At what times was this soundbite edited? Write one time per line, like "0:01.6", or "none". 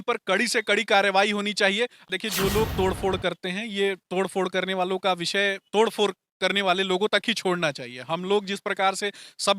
0:02.0